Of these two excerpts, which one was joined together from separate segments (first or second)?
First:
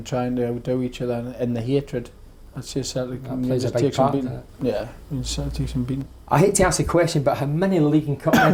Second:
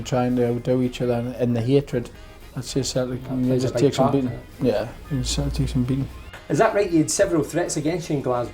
second